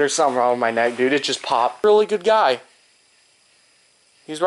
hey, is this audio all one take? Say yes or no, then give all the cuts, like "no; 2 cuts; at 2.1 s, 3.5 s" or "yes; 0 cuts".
no; 1 cut; at 1.8 s